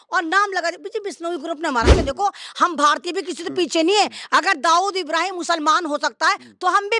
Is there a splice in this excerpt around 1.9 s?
yes; 1 cut; at 1.9 s

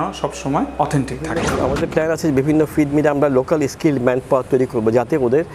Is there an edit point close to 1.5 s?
yes; 1 cut; at 1.5 s

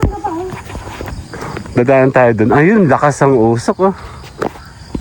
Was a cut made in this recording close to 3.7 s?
no; 1 cut; at 1.1 s

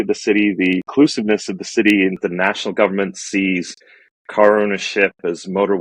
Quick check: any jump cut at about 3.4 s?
no; 2 cuts; at 0.9 s, 2.2 s

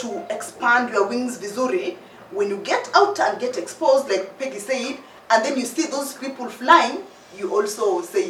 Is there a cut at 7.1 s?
no; 0 cuts

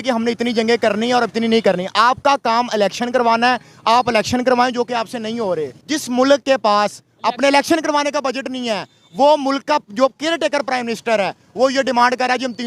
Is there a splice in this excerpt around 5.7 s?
yes; 1 cut; at 5.7 s

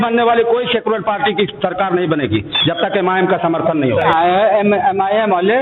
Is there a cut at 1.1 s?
no; 1 cut; at 4.1 s

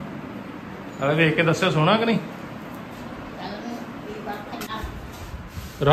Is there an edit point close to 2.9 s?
no; 1 cut; at 4.7 s

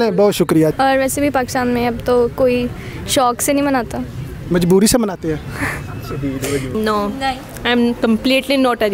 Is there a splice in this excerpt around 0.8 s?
yes; 2 cuts; at 0.8 s, 6.7 s

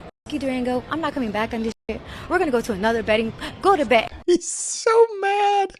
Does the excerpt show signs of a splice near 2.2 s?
no; 1 cut; at 4.1 s

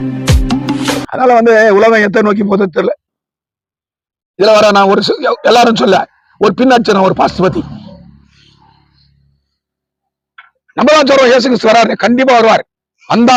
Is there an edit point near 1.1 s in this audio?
no; 0 cuts

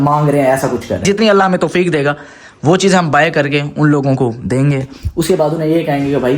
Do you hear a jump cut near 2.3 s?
no; 1 cut; at 1.0 s

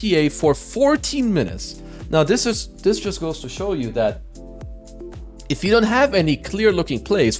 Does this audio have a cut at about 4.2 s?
no; 0 cuts

